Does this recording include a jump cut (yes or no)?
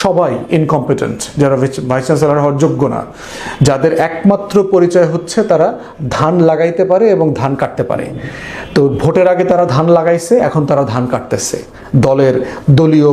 no